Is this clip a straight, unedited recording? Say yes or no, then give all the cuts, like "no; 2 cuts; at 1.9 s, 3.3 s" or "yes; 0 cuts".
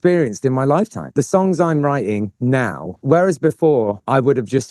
no; 2 cuts; at 1.1 s, 3.0 s